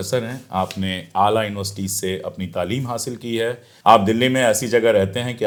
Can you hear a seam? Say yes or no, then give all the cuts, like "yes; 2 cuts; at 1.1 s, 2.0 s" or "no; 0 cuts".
no; 0 cuts